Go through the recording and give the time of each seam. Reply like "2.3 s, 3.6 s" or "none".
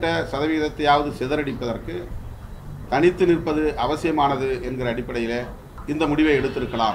5.7 s